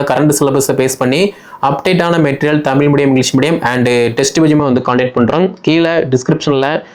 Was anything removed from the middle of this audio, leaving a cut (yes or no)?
no